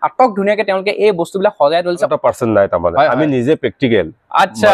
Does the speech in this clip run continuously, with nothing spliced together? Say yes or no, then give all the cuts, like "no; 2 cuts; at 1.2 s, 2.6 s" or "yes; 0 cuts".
no; 1 cut; at 2.1 s